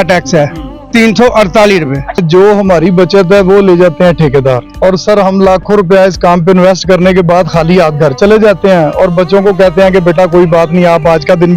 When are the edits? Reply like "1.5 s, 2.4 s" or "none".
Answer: 2.2 s, 4.7 s